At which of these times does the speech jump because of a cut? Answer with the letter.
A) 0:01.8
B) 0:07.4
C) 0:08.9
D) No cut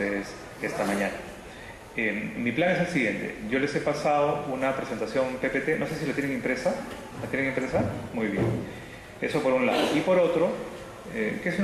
C